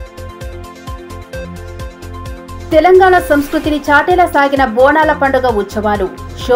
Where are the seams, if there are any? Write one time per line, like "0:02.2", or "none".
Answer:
0:02.6